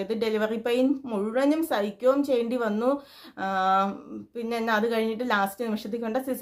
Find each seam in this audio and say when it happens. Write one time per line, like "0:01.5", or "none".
none